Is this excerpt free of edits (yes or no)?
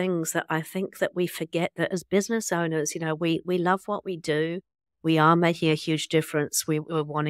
yes